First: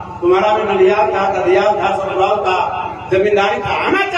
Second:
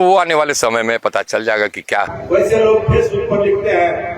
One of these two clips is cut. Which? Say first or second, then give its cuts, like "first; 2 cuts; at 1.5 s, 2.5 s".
second; 1 cut; at 2.1 s